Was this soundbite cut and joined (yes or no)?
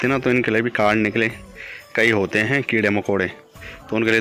no